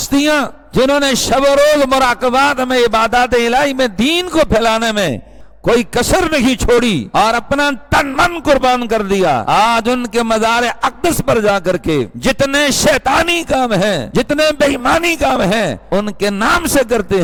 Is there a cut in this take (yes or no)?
no